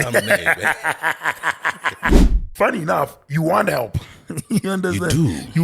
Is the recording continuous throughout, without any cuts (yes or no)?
no